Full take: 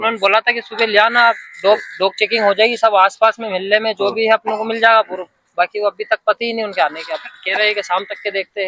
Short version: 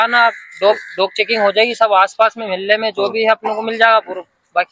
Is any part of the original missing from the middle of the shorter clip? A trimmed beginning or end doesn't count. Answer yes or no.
no